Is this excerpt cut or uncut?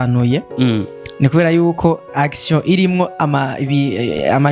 uncut